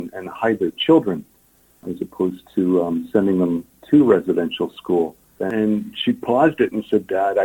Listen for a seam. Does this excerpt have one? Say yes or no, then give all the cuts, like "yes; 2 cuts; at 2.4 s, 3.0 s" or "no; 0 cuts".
yes; 2 cuts; at 1.9 s, 5.4 s